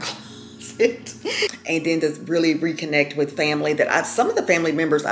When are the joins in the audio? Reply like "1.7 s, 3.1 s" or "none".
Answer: 1.6 s